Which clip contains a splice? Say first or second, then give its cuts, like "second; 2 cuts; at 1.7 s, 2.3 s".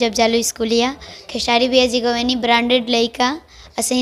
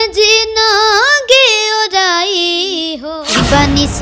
second; 1 cut; at 3.0 s